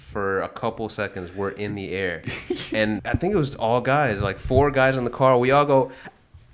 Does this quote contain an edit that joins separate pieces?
yes; 1 cut; at 3.0 s

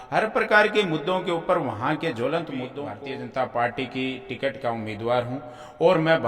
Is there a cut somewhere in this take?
yes; 1 cut; at 2.9 s

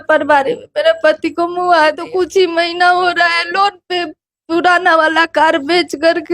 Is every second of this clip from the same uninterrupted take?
no; 1 cut; at 2.0 s

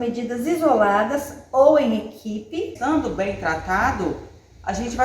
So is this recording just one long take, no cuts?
no; 1 cut; at 2.7 s

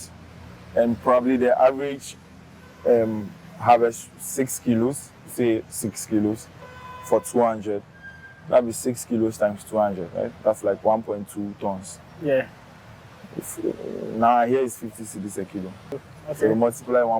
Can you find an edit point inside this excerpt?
yes; 1 cut; at 15.9 s

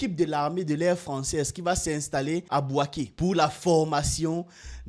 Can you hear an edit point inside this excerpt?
no; 0 cuts

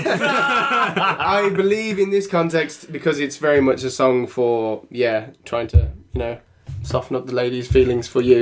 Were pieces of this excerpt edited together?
no; 0 cuts

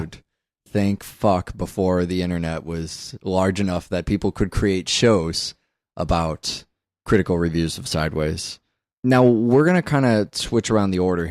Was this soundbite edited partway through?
no; 0 cuts

